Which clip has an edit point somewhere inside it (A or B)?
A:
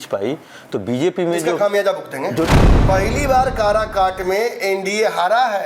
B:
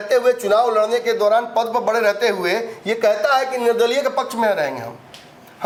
A